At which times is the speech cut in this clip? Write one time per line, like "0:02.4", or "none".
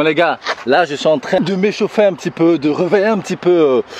0:01.4